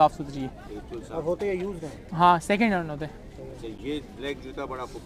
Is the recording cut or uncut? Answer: uncut